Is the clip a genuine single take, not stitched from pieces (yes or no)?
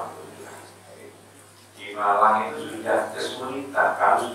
yes